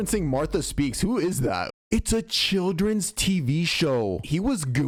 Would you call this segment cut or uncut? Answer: uncut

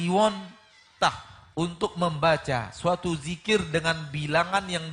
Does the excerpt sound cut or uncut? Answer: cut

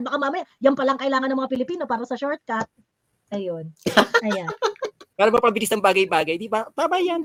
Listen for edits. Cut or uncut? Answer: uncut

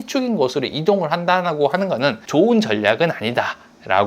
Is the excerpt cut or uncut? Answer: cut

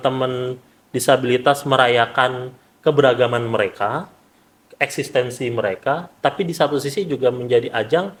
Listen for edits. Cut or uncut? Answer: uncut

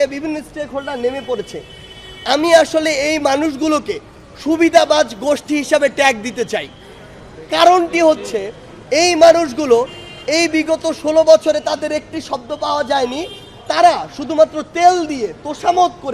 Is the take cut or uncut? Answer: uncut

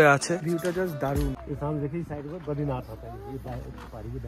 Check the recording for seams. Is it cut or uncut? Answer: cut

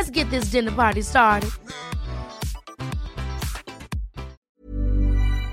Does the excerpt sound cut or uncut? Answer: cut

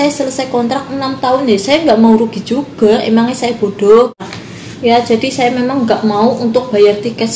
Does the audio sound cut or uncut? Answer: cut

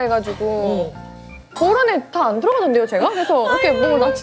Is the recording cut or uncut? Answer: uncut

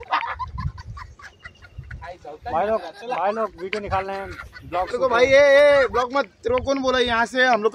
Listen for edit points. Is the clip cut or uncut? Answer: uncut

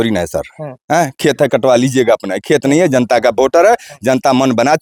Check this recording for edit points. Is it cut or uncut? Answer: uncut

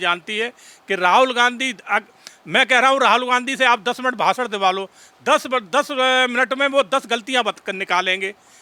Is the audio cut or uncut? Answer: uncut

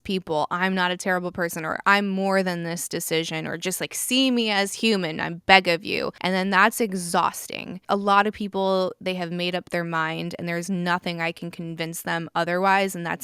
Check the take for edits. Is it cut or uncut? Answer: cut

